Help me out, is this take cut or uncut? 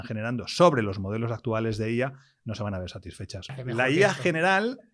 cut